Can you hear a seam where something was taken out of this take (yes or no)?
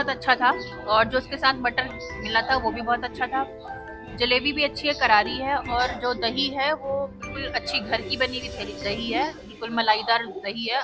no